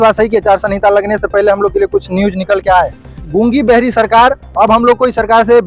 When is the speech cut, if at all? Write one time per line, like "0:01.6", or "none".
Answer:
0:03.2